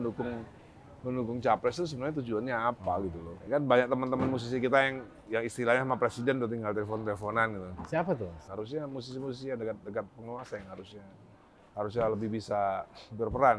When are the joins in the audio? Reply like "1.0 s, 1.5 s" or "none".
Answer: 3.4 s, 8.4 s